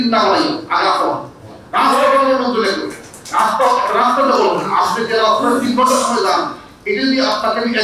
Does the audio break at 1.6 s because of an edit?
no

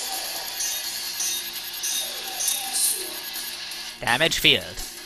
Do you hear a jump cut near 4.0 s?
no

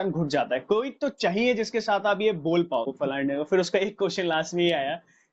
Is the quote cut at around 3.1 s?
yes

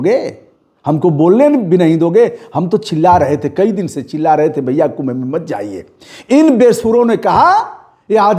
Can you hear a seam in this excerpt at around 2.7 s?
no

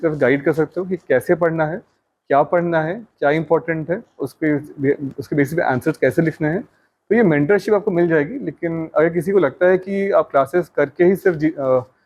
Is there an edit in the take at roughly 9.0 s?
no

